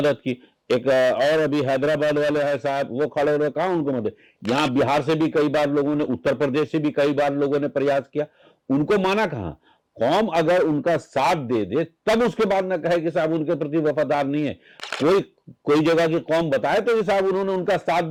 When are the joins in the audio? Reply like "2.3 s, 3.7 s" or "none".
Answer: none